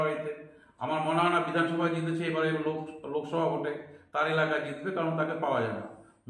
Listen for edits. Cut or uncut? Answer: uncut